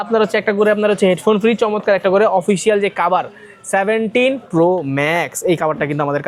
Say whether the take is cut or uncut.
uncut